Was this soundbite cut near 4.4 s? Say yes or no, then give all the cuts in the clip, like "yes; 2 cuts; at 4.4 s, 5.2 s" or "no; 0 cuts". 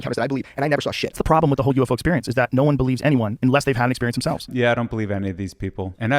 yes; 2 cuts; at 1.1 s, 4.4 s